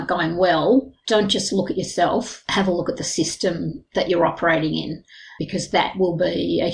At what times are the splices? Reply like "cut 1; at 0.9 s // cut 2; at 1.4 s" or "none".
cut 1; at 1.0 s